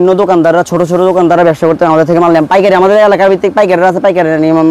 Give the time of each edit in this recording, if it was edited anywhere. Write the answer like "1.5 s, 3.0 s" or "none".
none